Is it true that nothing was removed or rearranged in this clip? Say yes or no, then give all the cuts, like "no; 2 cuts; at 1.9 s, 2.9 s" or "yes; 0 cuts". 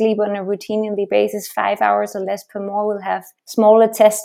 no; 1 cut; at 3.4 s